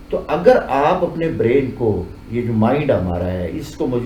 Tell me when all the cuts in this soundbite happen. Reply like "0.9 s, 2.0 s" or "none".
none